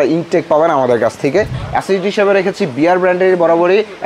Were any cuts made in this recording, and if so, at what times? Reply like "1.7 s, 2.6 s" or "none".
1.6 s

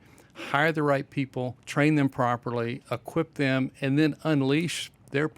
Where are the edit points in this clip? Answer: 1.6 s

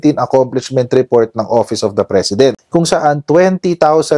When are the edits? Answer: 2.6 s

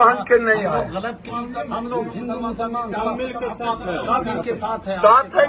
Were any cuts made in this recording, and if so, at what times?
1.3 s

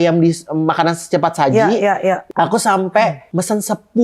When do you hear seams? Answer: 2.2 s, 3.2 s

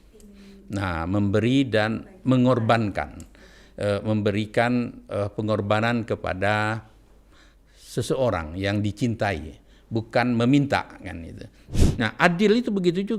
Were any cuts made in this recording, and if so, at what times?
11.7 s

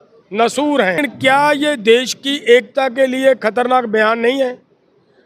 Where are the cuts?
1.0 s

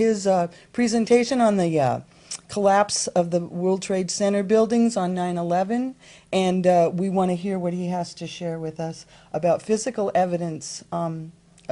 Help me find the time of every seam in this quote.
7.0 s

